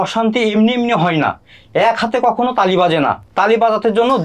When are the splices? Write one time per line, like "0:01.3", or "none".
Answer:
none